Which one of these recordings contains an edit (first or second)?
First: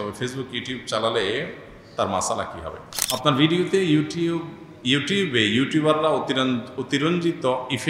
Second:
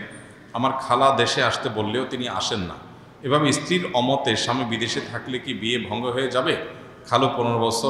first